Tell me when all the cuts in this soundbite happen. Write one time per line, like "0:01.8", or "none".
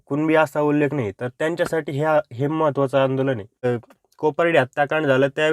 0:03.7